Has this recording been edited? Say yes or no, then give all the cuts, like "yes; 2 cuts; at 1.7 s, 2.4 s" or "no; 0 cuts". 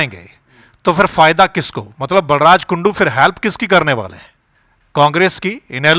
no; 0 cuts